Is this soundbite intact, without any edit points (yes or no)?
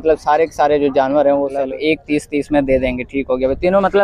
no